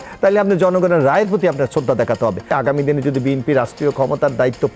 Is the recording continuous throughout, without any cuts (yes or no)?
no